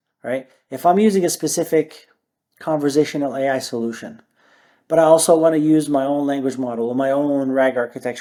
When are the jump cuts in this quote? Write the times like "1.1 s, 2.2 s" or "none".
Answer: none